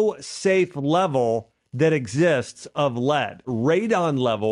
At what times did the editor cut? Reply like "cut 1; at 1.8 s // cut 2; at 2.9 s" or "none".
cut 1; at 3.5 s